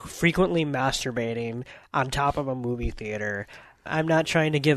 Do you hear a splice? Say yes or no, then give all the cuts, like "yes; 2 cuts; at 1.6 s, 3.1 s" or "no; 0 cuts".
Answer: yes; 1 cut; at 3.9 s